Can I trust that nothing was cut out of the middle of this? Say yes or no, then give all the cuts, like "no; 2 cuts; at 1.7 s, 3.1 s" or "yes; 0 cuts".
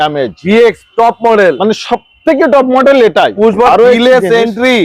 no; 1 cut; at 3.7 s